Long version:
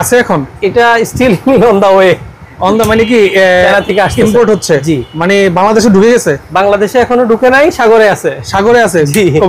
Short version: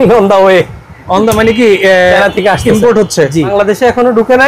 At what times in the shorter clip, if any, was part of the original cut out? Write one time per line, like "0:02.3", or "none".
0:03.5